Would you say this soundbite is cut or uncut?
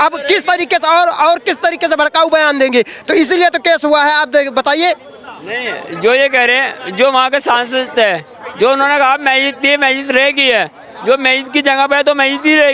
uncut